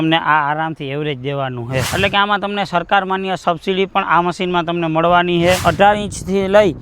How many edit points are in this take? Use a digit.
2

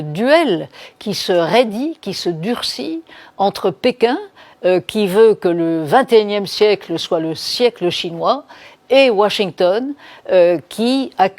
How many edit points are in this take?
0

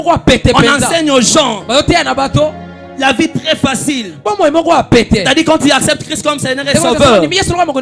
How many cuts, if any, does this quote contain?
0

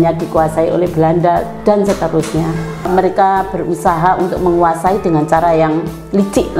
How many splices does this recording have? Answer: 1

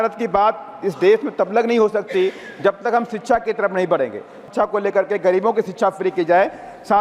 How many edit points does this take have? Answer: 1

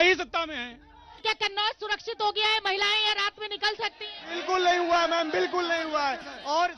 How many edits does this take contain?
1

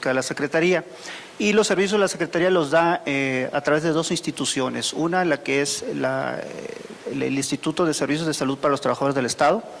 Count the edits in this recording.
1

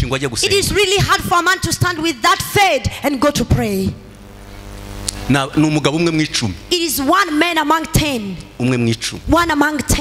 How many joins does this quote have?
0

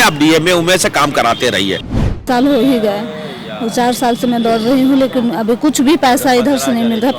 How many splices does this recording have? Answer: 1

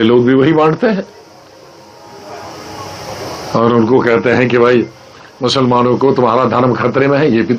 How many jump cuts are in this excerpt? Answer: 0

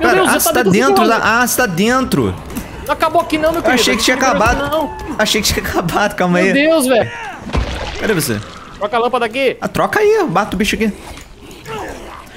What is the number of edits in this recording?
1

